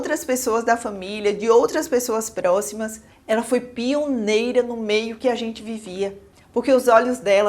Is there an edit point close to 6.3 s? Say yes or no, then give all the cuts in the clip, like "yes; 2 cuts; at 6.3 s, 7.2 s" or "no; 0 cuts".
yes; 1 cut; at 6.3 s